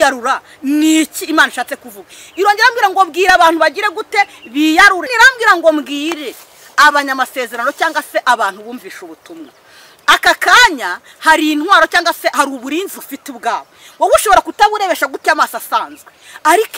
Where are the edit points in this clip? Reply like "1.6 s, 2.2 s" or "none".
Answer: 5.1 s